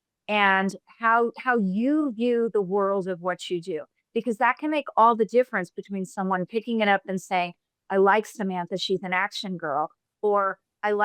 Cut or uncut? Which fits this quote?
uncut